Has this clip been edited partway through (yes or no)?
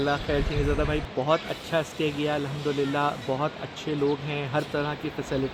no